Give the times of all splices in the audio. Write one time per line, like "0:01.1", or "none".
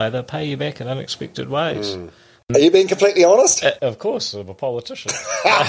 0:02.4
0:03.8